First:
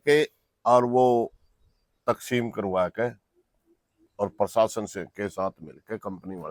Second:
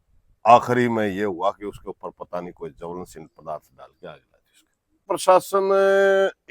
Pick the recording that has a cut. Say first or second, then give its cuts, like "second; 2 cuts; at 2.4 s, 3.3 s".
second; 1 cut; at 5.1 s